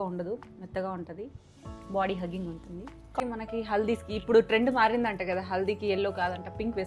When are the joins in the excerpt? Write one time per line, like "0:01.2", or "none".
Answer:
0:03.2